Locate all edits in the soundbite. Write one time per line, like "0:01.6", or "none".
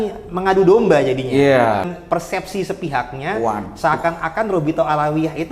0:01.9